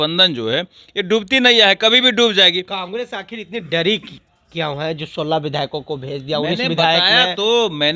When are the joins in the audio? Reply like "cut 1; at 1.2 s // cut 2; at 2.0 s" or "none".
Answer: none